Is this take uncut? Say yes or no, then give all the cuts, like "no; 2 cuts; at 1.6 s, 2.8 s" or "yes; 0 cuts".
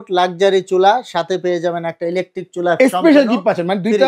yes; 0 cuts